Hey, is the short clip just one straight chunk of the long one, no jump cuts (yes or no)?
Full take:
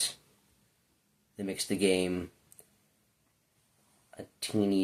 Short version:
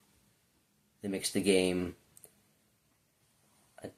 yes